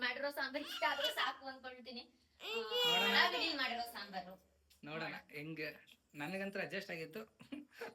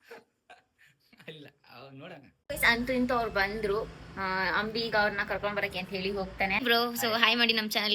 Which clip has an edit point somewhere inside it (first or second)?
second